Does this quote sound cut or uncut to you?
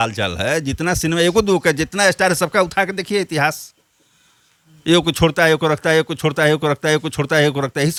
uncut